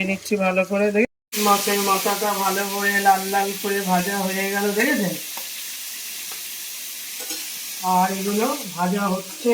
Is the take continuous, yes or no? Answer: no